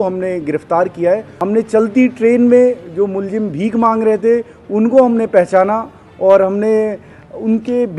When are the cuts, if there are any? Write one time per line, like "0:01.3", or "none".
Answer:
0:01.3